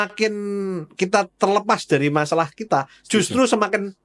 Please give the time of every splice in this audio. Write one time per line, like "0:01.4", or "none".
none